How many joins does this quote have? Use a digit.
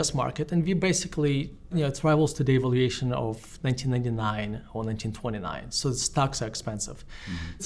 0